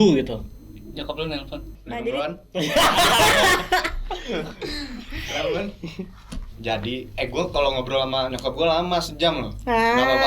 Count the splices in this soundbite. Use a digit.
1